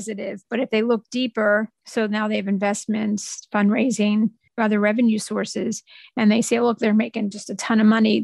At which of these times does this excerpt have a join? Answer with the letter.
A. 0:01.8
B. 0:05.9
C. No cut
A